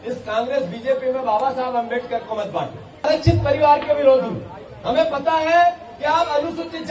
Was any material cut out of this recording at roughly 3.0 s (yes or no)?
yes